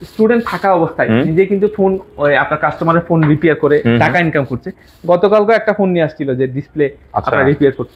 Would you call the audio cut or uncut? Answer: uncut